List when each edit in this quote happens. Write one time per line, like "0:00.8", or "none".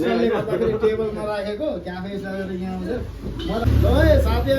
0:03.6